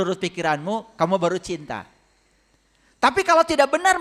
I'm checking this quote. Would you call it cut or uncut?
uncut